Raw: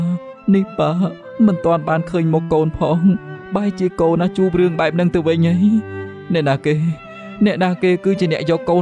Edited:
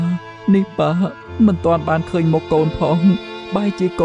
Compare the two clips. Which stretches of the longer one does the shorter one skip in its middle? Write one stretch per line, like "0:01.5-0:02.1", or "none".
none